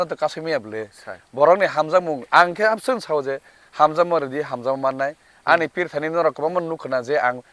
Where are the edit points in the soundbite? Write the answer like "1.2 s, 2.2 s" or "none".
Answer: 5.3 s